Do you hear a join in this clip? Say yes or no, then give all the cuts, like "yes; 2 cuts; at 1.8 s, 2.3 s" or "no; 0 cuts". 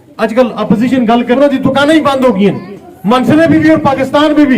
yes; 1 cut; at 1.4 s